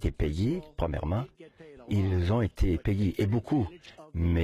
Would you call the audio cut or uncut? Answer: uncut